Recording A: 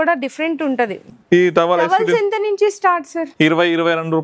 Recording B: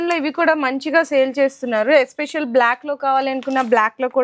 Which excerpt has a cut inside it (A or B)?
A